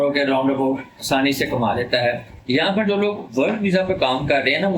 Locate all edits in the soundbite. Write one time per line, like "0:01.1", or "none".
0:02.3